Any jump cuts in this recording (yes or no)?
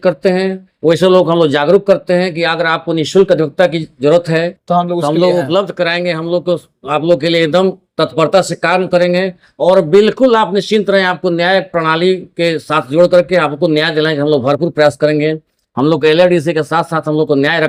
no